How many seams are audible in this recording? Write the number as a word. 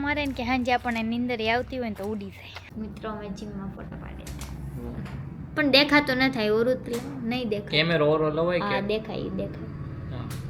one